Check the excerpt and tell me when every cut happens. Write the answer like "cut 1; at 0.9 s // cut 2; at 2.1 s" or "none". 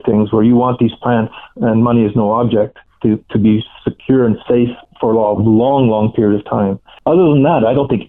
cut 1; at 2.8 s // cut 2; at 4.8 s // cut 3; at 6.9 s

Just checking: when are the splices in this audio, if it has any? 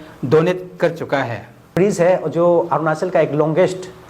cut 1; at 1.6 s

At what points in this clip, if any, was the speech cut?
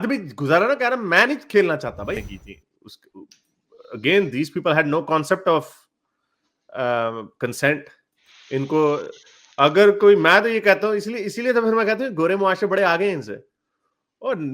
cut 1; at 2.2 s

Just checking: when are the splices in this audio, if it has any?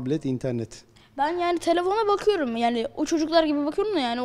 none

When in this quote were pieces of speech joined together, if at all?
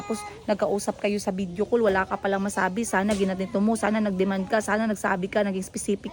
none

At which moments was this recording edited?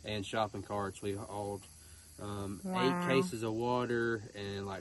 none

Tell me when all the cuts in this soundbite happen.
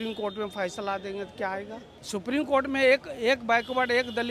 cut 1; at 1.9 s

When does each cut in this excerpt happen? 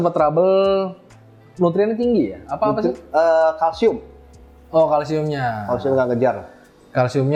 none

